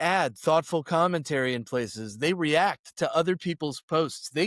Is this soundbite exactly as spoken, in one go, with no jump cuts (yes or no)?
yes